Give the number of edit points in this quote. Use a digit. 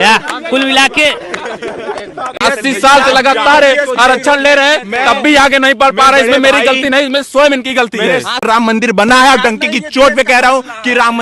2